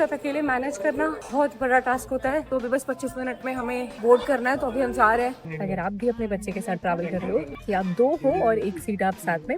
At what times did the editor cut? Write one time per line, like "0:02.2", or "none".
0:01.2
0:02.5
0:03.9
0:05.5
0:07.5